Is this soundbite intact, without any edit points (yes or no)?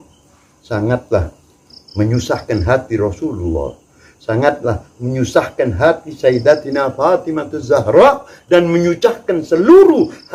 yes